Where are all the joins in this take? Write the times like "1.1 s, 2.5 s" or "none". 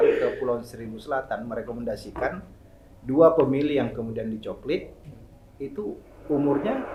none